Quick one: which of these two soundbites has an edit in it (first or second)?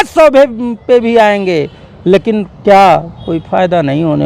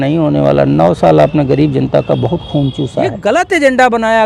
second